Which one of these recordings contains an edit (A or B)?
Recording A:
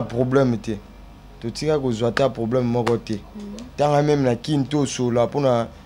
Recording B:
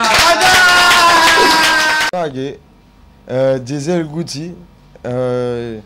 B